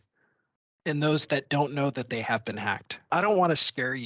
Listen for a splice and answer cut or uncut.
cut